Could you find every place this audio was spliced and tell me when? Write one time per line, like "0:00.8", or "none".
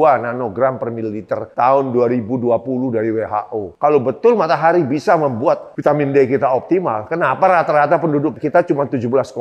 0:08.3